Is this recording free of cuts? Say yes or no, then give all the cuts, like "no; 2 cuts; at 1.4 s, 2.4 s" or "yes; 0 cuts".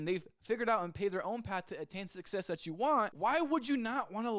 no; 1 cut; at 3.1 s